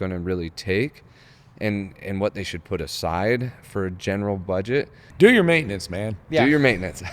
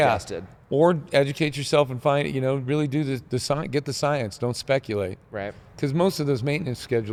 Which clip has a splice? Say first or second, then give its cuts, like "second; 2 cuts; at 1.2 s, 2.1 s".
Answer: first; 1 cut; at 5.0 s